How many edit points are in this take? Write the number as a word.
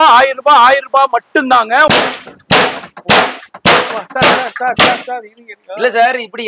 one